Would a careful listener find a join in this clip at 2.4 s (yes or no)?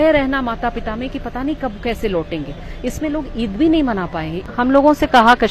no